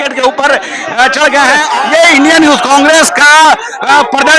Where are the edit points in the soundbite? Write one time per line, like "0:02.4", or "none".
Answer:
0:01.6